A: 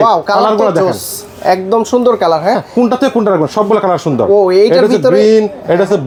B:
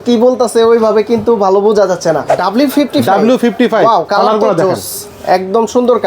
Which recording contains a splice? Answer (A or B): B